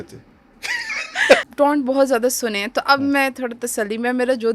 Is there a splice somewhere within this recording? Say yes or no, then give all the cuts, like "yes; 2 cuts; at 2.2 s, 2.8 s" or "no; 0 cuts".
yes; 1 cut; at 1.4 s